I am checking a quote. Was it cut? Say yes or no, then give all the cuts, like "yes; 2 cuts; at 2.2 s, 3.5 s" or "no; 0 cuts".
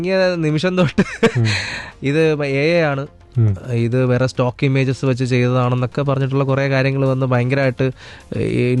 no; 0 cuts